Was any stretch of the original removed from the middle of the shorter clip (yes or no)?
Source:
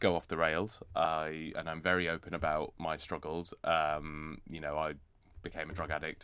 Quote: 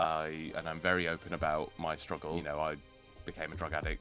yes